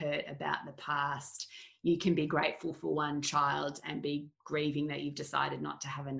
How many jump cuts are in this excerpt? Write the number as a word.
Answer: one